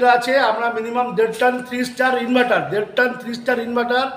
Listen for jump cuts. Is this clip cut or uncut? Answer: uncut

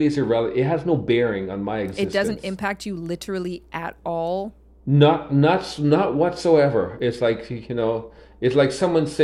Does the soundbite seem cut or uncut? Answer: uncut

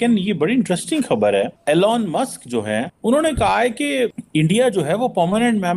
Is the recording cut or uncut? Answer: cut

